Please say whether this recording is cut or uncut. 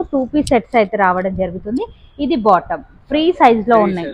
uncut